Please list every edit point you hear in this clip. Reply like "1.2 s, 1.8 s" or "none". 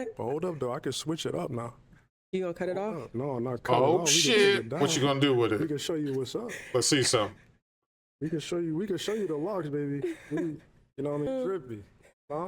11.3 s

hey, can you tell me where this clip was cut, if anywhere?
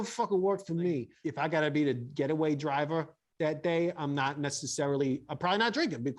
1.2 s

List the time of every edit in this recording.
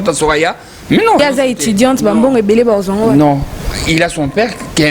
1.2 s

